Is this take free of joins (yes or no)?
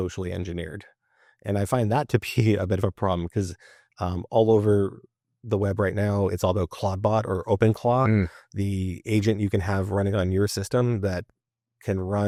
yes